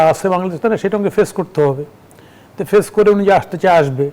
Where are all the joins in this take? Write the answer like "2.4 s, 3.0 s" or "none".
none